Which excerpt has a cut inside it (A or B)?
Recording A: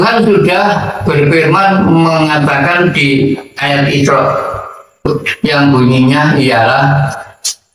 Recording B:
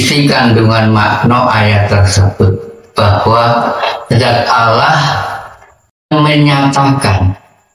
B